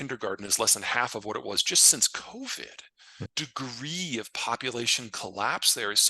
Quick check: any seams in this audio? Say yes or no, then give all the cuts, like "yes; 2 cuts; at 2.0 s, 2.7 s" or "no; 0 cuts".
yes; 1 cut; at 3.3 s